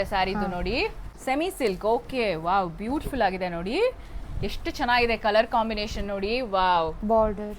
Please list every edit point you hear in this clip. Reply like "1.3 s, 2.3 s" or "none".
1.1 s